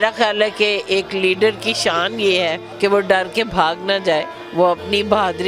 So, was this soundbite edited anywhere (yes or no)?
yes